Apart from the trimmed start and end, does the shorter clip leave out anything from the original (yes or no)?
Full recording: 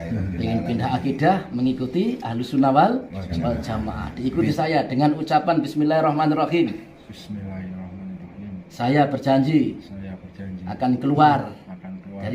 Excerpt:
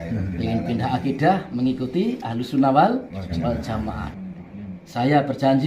yes